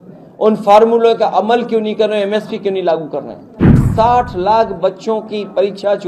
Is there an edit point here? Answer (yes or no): yes